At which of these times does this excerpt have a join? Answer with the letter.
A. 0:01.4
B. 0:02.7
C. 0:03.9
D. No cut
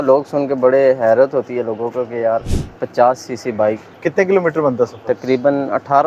C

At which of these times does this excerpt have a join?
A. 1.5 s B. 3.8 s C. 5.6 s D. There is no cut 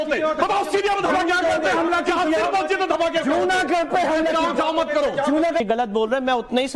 C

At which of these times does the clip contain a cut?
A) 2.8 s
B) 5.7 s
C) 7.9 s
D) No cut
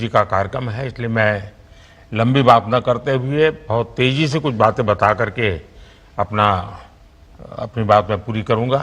C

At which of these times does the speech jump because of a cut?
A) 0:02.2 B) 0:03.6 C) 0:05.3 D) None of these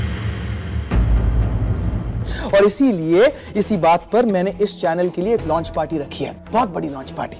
A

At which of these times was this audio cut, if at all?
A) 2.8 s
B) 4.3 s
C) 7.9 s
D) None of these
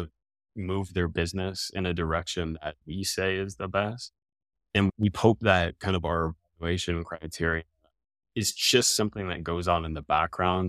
A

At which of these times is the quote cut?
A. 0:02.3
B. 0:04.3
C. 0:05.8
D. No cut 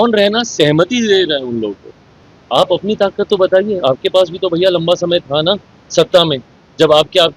A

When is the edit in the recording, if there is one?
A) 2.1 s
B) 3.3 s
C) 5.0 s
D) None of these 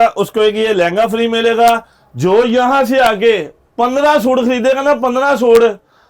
D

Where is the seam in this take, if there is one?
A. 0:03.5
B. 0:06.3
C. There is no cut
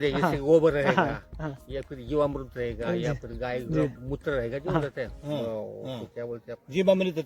C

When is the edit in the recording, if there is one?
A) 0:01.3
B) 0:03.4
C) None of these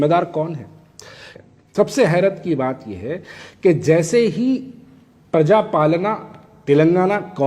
A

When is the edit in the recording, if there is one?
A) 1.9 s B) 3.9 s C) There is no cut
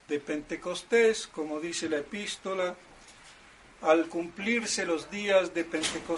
B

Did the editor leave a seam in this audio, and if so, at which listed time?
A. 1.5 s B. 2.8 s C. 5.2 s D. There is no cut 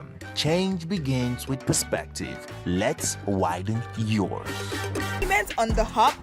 C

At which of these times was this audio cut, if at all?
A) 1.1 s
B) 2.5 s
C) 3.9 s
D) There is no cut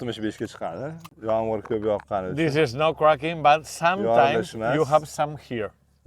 A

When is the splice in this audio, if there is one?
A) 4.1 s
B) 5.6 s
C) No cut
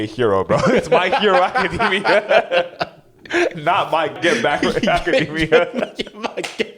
A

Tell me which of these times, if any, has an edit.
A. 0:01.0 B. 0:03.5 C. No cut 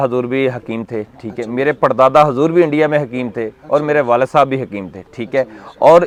C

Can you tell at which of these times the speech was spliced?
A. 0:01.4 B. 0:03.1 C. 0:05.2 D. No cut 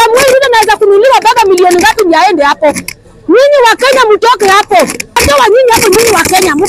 C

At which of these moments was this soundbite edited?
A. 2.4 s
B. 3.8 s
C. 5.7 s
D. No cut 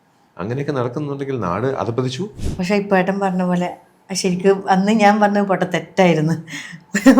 A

